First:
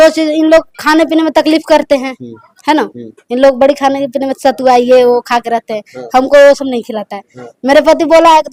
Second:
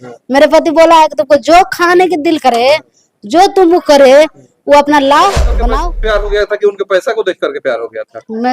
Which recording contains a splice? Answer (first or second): second